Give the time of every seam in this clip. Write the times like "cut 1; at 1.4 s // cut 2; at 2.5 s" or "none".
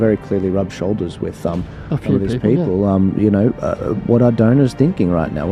none